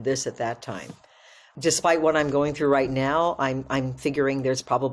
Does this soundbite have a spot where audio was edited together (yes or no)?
yes